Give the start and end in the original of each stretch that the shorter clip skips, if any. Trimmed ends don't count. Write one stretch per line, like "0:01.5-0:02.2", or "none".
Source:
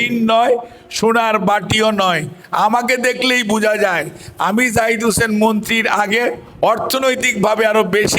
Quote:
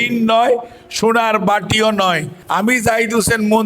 0:02.3-0:04.2